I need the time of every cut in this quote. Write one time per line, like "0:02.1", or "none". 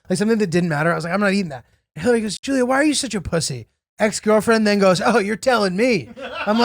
0:02.3